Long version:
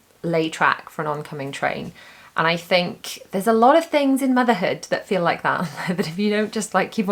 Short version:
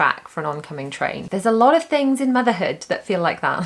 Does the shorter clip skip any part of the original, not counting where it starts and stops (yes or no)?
yes